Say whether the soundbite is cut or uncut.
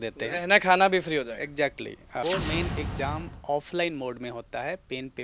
cut